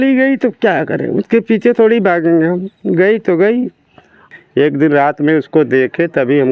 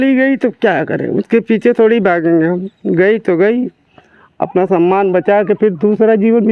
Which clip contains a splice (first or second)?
first